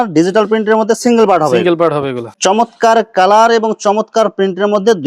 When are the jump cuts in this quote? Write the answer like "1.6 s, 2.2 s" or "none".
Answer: 2.2 s

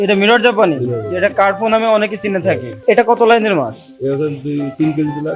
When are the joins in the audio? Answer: 2.8 s

